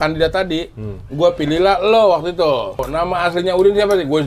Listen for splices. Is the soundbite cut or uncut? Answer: cut